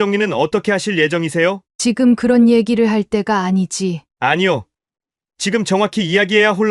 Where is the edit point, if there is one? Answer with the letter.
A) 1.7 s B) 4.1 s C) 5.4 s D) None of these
A